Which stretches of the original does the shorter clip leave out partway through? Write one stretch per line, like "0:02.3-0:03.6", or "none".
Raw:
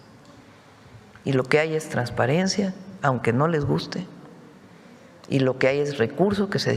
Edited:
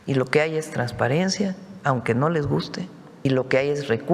0:04.4-0:05.3